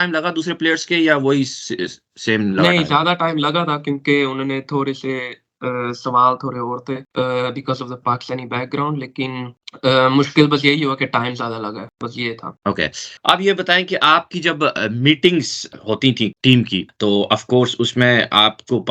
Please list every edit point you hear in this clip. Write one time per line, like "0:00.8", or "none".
none

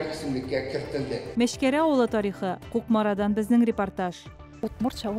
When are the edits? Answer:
0:01.2

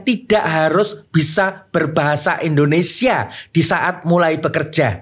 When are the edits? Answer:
none

